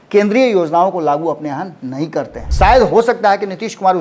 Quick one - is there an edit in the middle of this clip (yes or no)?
yes